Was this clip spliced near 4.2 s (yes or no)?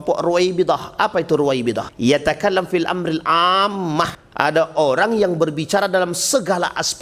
yes